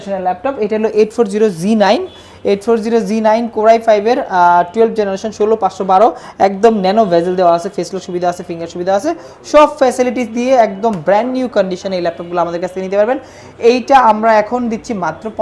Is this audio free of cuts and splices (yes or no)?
yes